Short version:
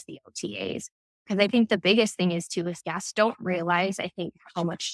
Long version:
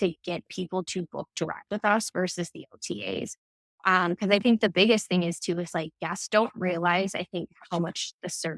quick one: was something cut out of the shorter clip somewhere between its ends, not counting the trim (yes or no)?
yes